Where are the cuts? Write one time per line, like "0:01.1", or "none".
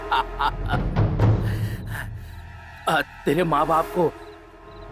none